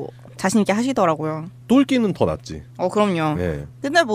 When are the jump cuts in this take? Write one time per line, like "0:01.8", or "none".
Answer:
0:03.0